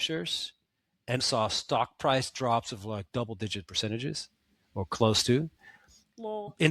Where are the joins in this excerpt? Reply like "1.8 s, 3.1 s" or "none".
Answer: 1.2 s